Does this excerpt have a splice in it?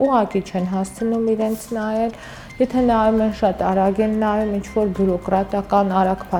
no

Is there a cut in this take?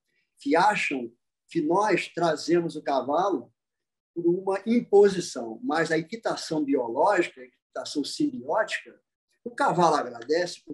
no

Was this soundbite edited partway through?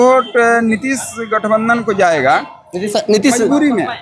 no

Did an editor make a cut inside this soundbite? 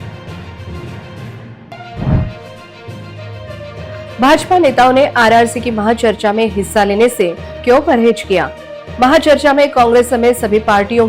yes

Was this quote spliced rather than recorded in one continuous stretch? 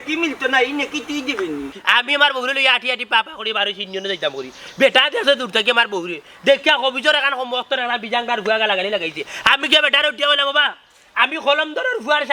yes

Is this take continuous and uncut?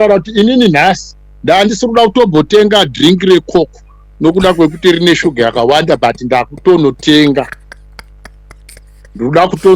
yes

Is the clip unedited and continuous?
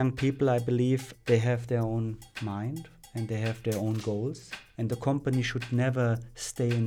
no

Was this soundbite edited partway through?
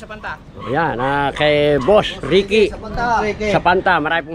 no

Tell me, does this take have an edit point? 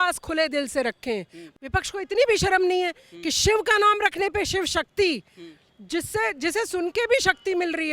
yes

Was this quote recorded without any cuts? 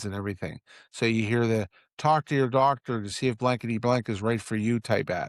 yes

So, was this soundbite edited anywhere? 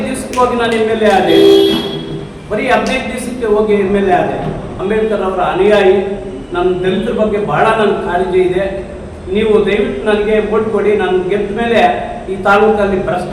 yes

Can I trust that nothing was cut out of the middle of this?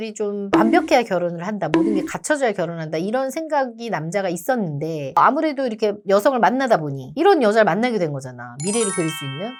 yes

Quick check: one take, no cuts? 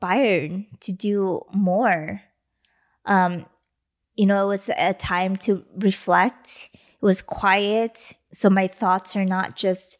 yes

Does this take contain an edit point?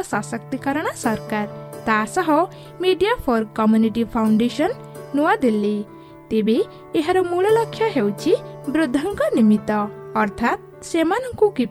no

